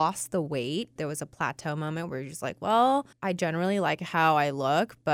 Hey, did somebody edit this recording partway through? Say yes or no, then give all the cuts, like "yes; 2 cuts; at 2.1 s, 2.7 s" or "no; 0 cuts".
yes; 2 cuts; at 1.0 s, 3.1 s